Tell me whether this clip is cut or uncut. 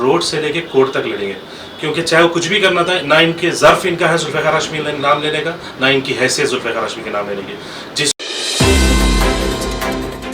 cut